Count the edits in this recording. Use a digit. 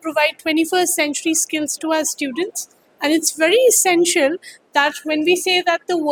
0